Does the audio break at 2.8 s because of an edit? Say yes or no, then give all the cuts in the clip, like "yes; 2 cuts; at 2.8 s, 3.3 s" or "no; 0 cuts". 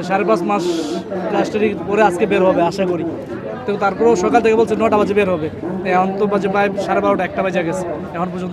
no; 0 cuts